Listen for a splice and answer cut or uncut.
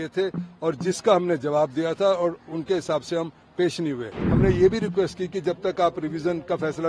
cut